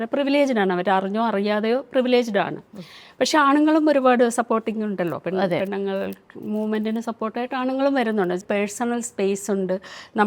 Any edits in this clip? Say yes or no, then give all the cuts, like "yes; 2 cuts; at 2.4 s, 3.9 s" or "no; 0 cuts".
yes; 1 cut; at 8.4 s